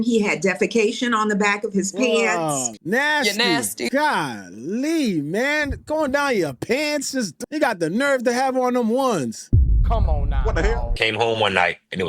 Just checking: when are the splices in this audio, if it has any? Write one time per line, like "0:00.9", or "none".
0:02.8
0:10.7